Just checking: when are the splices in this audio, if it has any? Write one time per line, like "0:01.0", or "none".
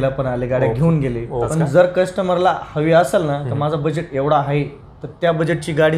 0:01.5